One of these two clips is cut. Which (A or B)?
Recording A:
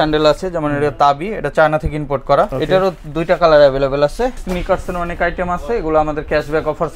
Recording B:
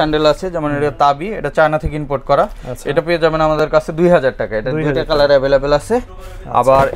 A